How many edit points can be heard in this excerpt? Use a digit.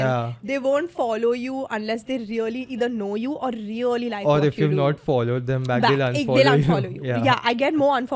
0